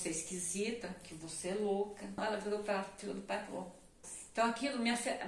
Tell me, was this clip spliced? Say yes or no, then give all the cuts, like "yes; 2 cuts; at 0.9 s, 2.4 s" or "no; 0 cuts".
yes; 2 cuts; at 2.2 s, 4.1 s